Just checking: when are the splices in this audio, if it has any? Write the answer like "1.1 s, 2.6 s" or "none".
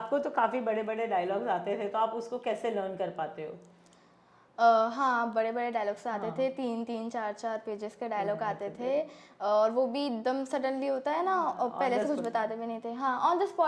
none

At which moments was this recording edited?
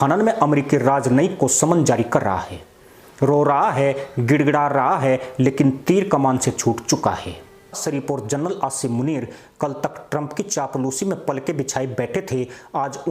7.8 s

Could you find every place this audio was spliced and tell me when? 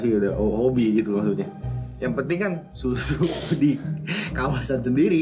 2.7 s

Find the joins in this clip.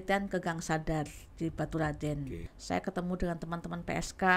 2.5 s

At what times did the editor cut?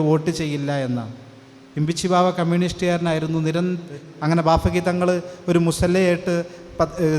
4.0 s

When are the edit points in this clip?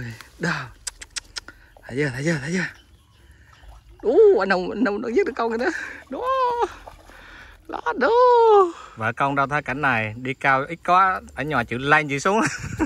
8.9 s

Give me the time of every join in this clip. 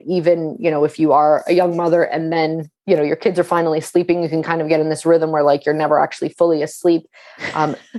none

